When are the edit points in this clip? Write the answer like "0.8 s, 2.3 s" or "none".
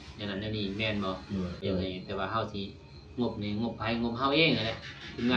1.6 s